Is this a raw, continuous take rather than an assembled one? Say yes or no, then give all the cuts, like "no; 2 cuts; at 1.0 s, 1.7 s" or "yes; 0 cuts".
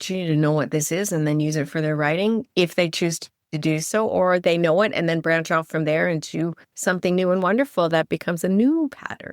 yes; 0 cuts